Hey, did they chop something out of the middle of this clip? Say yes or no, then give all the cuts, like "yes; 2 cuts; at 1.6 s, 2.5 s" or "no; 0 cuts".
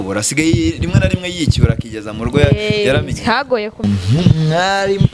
yes; 1 cut; at 3.8 s